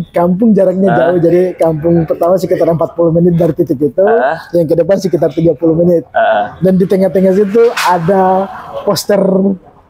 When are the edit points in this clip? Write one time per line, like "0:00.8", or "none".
none